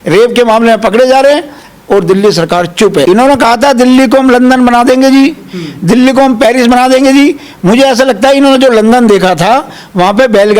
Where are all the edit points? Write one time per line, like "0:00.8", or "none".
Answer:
0:03.1